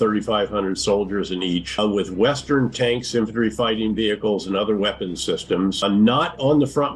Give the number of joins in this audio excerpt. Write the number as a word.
two